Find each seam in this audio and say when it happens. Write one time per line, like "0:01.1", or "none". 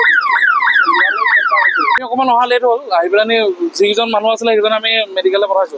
0:02.0